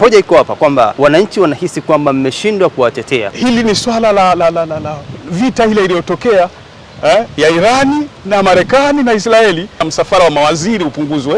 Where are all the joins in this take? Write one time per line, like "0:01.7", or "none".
0:00.9
0:03.3
0:09.9